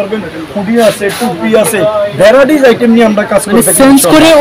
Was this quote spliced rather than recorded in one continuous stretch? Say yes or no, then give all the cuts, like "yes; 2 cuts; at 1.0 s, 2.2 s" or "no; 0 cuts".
no; 0 cuts